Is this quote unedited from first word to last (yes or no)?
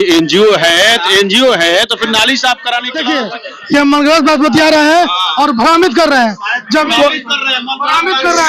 no